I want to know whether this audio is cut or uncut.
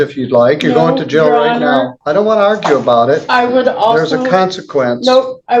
cut